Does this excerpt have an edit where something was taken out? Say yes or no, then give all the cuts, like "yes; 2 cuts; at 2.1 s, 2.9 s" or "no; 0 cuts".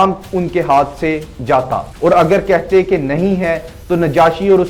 yes; 1 cut; at 1.9 s